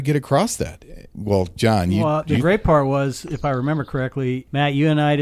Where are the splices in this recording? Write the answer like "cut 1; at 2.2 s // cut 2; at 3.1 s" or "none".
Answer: cut 1; at 1.1 s // cut 2; at 2.0 s // cut 3; at 4.5 s